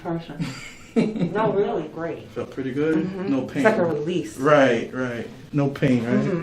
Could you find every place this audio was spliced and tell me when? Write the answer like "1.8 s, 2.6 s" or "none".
2.0 s